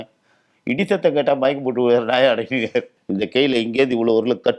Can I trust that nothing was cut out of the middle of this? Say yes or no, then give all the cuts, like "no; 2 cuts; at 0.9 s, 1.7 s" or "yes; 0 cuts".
no; 1 cut; at 3.0 s